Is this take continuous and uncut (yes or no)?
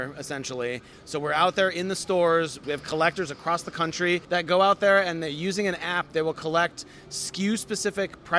no